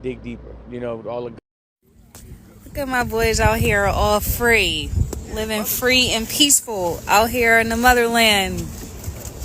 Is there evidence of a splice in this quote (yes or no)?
yes